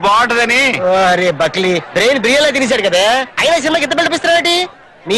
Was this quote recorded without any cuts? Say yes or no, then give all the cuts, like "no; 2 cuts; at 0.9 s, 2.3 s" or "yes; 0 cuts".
no; 1 cut; at 1.6 s